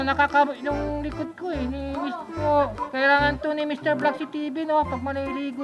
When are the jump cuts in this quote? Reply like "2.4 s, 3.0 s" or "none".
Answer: 2.4 s